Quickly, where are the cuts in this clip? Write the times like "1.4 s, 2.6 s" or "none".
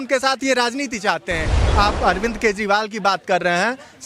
1.7 s